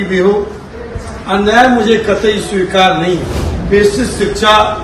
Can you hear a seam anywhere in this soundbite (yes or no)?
yes